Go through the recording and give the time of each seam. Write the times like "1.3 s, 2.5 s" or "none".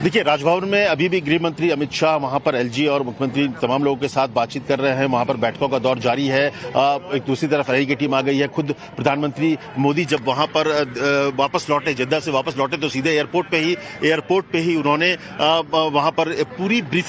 15.4 s

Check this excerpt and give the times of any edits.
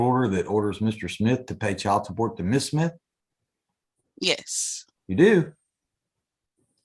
none

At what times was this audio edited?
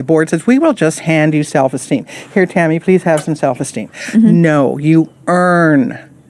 none

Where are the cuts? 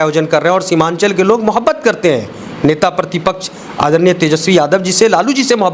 none

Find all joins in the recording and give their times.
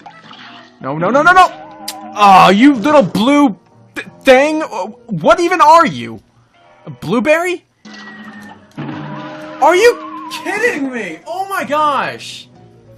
none

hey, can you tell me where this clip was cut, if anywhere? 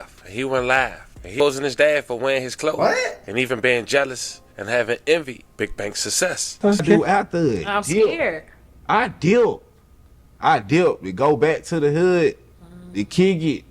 1.3 s, 6.8 s

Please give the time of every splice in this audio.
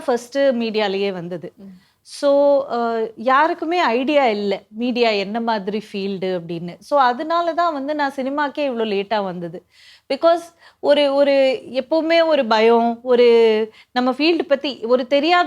none

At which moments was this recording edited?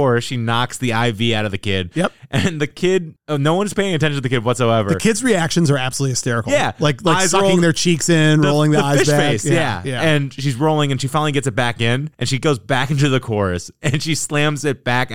none

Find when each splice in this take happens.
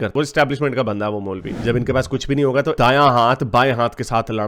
1.5 s

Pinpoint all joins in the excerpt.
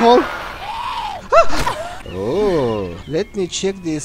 1.9 s, 3.0 s

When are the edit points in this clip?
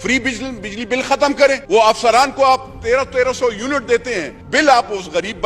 1.6 s, 4.3 s

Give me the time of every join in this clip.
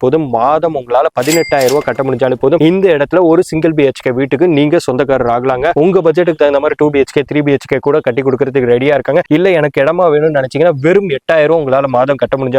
none

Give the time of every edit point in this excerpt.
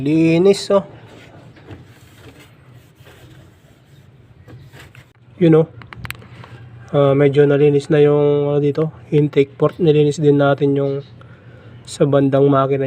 5.1 s

